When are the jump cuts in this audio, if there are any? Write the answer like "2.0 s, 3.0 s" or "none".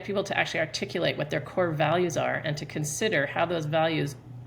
none